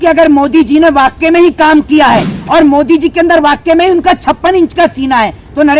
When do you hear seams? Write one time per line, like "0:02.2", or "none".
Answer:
none